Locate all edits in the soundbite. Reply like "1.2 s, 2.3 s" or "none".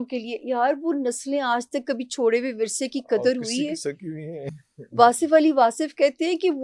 none